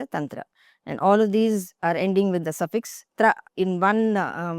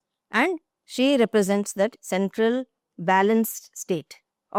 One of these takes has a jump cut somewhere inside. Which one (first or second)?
first